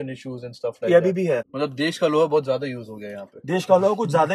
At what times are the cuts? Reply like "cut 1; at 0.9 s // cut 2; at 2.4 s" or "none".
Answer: cut 1; at 1.5 s